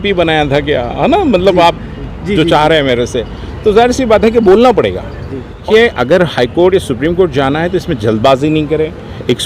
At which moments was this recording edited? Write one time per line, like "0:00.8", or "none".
0:05.6